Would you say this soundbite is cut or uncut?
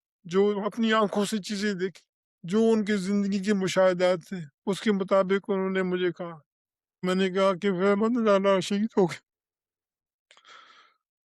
cut